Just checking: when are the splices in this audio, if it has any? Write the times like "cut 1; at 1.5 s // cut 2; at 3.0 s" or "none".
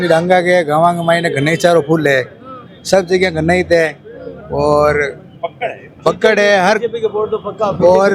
none